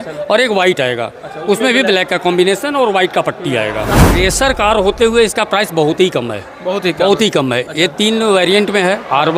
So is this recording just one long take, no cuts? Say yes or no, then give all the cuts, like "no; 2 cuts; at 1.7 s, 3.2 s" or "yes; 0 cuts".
no; 1 cut; at 4.1 s